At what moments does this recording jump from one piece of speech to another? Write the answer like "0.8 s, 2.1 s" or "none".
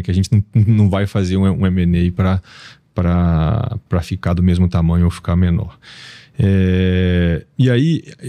none